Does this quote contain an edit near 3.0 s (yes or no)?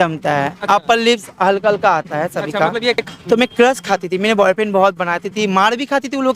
yes